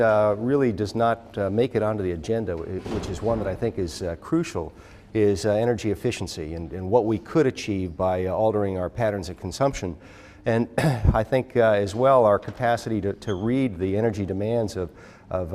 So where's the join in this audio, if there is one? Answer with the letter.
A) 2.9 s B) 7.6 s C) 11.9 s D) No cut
C